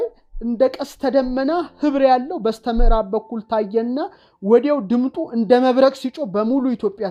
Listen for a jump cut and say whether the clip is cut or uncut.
uncut